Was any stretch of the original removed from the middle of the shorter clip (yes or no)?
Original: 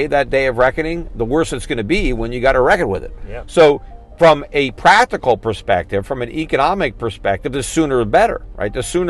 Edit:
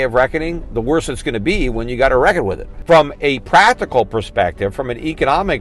yes